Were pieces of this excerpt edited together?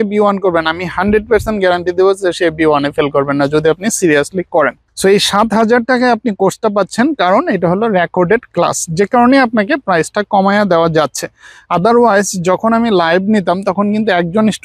no; 0 cuts

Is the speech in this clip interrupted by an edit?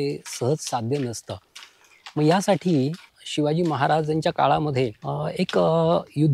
yes; 2 cuts; at 3.2 s, 5.0 s

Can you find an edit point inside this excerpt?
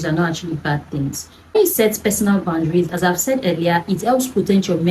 no; 0 cuts

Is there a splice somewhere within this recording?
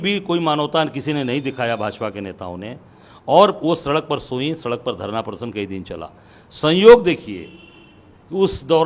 no; 0 cuts

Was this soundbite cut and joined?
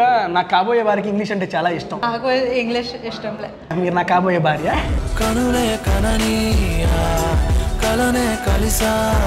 yes; 2 cuts; at 2.0 s, 3.7 s

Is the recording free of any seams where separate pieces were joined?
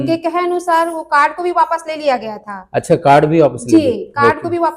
yes; 0 cuts

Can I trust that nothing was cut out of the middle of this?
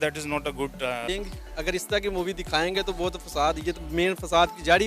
no; 1 cut; at 1.0 s

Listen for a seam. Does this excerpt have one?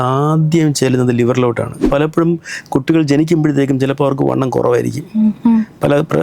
yes; 1 cut; at 1.9 s

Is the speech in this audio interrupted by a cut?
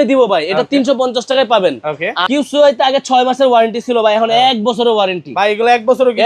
yes; 1 cut; at 2.2 s

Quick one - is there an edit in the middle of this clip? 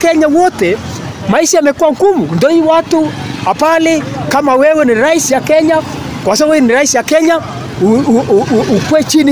no; 0 cuts

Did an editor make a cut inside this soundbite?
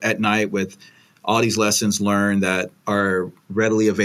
yes; 1 cut; at 2.7 s

